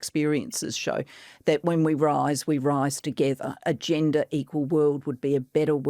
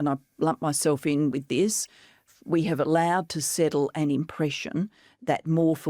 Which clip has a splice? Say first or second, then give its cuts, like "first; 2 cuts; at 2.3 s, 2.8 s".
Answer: first; 1 cut; at 3.0 s